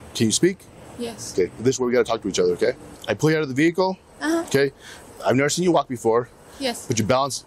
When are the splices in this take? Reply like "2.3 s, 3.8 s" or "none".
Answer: 2.9 s